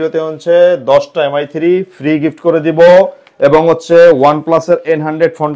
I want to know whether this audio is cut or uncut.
uncut